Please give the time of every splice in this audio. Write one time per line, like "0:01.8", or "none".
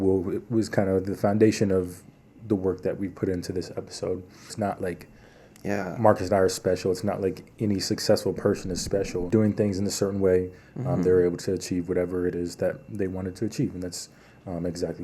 0:04.5
0:09.3